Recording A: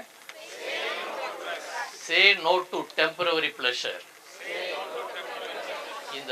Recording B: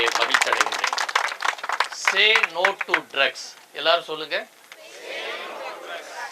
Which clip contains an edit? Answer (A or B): B